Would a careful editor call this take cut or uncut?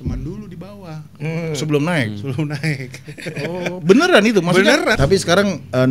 cut